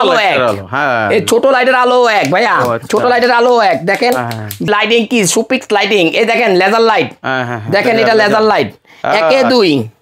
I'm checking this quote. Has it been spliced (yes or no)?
yes